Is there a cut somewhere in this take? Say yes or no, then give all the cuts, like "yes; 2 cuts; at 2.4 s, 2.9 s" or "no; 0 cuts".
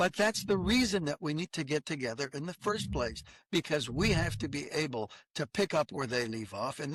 no; 0 cuts